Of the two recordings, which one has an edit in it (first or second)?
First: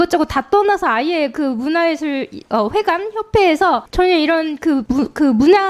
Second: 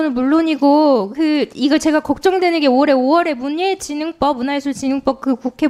first